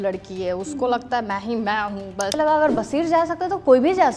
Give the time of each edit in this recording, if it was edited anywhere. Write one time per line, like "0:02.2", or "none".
0:02.3